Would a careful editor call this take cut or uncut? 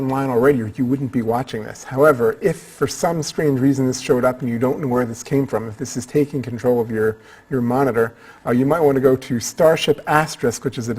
cut